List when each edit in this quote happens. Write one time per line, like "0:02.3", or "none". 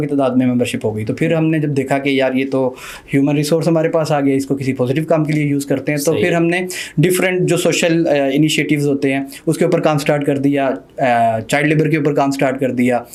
none